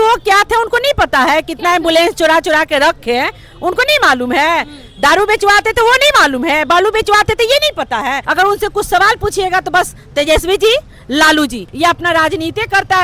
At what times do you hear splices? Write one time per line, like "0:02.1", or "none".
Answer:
0:08.2
0:11.6